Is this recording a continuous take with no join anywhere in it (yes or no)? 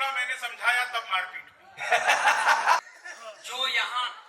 no